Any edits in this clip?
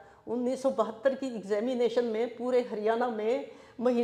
no; 0 cuts

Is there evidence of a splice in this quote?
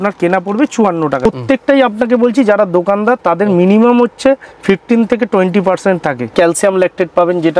yes; 2 cuts; at 1.2 s, 6.3 s

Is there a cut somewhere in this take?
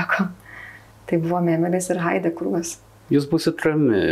yes; 1 cut; at 3.0 s

